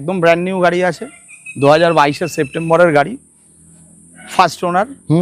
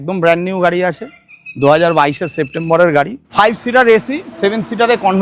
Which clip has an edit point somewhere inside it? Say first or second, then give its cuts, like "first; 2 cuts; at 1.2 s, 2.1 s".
second; 1 cut; at 3.2 s